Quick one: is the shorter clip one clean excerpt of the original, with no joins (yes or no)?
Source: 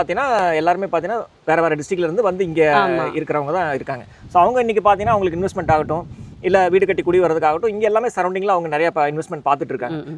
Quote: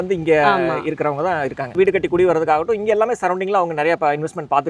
no